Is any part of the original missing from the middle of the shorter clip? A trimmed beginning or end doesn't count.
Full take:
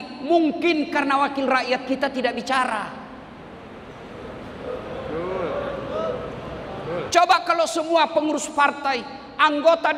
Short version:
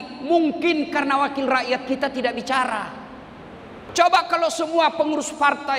yes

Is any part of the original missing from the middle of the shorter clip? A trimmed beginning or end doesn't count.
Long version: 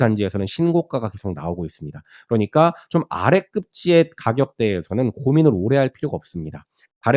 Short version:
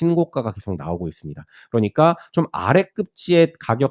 no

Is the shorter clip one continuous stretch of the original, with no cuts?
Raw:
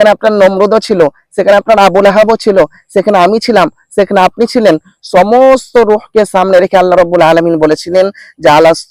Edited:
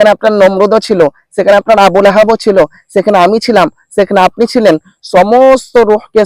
yes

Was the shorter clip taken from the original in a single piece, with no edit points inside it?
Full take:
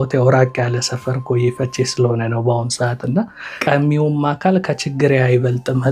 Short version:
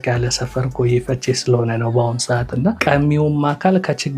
no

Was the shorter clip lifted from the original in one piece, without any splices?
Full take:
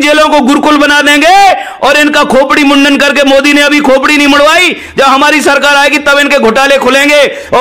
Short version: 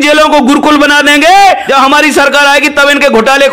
no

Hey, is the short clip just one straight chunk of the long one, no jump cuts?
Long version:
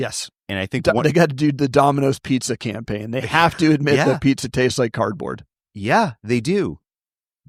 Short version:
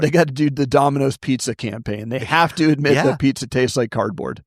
yes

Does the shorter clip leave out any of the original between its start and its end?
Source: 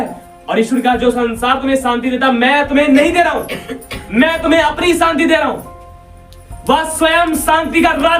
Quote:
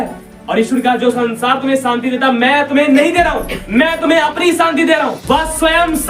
yes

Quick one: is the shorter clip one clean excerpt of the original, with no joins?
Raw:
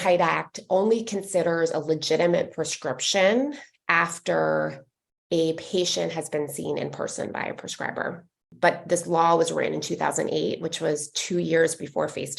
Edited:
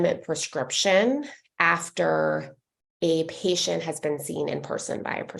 yes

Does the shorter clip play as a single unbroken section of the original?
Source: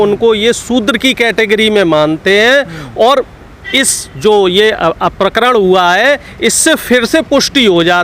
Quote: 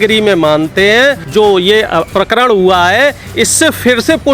no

